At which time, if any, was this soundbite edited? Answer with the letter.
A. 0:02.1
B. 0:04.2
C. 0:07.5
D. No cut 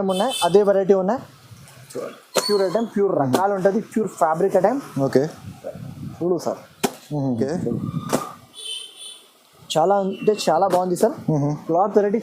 C